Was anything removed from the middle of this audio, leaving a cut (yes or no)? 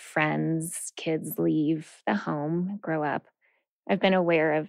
yes